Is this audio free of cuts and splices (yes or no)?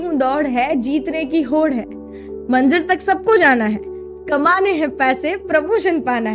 yes